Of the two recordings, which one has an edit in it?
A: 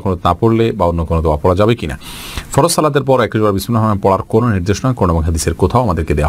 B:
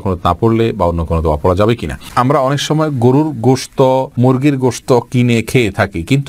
B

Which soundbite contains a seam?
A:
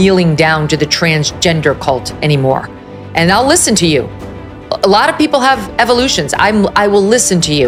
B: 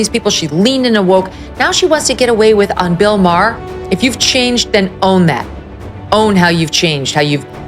B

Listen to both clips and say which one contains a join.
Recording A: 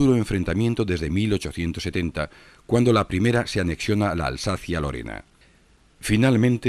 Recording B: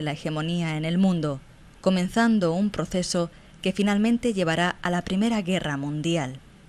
B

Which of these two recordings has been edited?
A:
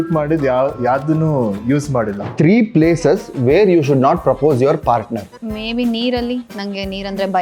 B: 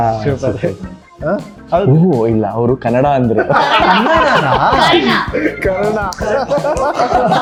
A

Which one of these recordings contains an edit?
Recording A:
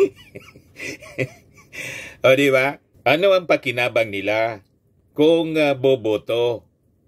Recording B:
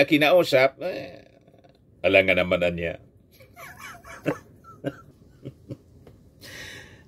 B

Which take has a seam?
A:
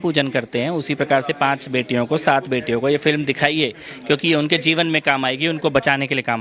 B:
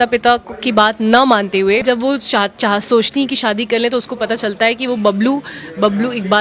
B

